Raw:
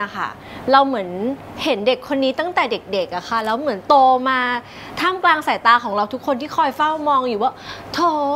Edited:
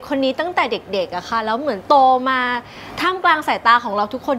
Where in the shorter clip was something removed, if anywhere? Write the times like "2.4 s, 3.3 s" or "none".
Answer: none

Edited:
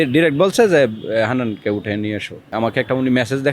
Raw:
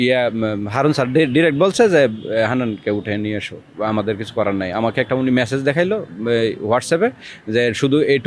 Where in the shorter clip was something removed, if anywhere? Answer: 2.5 s

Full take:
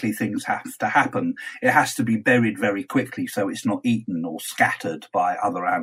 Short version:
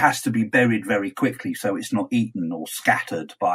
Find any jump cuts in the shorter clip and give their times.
none

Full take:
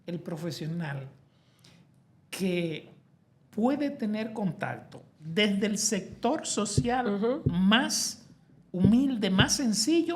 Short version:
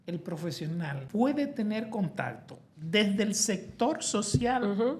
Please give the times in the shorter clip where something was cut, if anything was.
1.0 s

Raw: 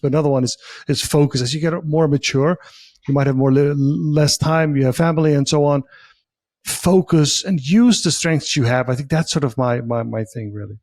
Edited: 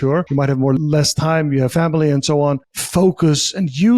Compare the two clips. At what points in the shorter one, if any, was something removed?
0.7 s, 2.7 s

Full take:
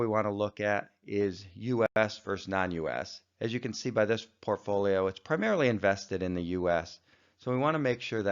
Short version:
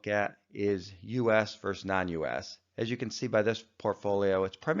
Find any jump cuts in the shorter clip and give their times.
1.3 s

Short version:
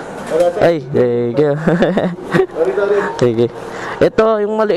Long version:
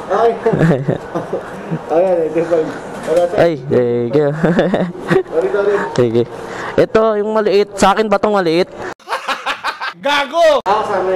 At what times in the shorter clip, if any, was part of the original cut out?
none

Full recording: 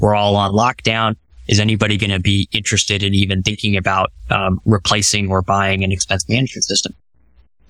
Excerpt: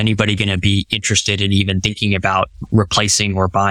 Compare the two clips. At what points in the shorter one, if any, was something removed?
2.6 s

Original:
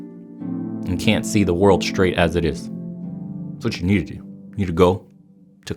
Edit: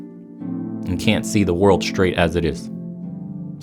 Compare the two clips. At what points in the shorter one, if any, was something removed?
none

